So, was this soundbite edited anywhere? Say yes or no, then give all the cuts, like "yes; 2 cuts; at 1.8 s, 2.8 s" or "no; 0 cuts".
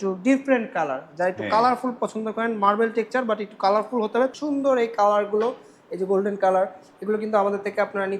yes; 1 cut; at 4.3 s